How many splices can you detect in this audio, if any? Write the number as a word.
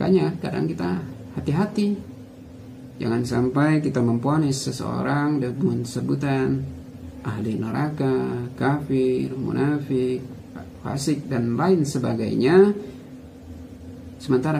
zero